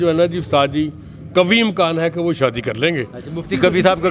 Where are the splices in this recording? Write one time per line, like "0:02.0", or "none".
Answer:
none